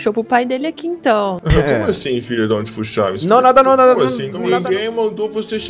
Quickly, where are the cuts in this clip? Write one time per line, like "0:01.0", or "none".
0:01.4
0:04.3